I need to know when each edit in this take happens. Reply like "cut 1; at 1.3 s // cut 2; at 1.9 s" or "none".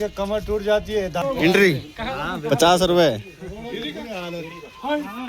cut 1; at 1.1 s